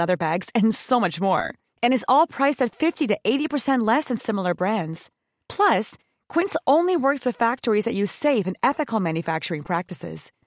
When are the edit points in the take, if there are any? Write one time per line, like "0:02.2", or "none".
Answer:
none